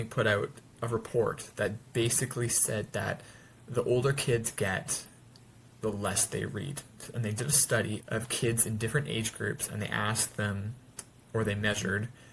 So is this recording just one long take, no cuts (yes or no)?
yes